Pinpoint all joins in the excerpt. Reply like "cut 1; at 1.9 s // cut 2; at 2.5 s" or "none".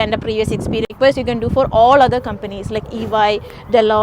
cut 1; at 0.9 s